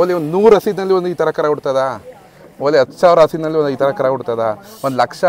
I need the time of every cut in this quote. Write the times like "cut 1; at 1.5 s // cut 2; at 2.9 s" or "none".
none